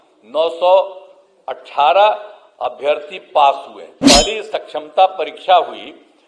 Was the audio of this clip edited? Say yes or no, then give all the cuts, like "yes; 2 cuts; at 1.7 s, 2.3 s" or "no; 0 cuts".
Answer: yes; 1 cut; at 4.0 s